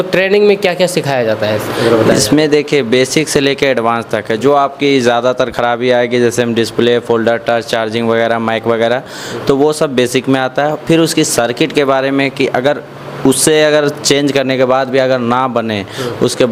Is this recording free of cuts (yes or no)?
yes